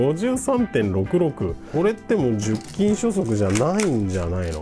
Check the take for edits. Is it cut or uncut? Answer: cut